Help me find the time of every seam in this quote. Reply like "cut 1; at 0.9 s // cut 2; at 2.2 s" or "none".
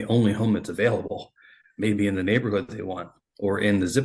none